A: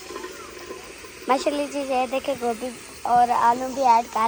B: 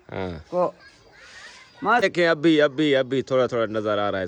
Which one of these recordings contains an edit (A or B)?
B